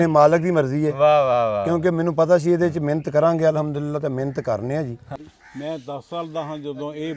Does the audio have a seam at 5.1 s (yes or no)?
yes